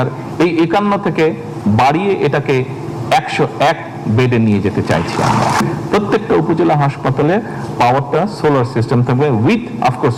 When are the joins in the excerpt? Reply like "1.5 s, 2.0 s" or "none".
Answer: none